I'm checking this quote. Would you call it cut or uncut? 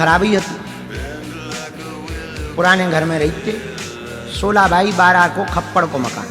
cut